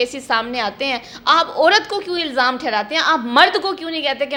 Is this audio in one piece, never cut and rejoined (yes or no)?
yes